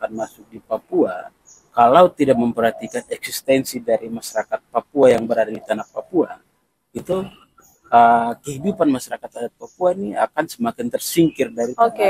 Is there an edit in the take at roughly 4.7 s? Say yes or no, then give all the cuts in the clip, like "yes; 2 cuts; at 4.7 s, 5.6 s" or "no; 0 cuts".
no; 0 cuts